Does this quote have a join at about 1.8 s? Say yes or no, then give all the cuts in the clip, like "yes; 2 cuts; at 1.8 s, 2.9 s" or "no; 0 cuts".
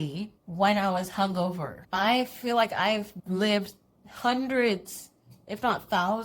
yes; 1 cut; at 1.8 s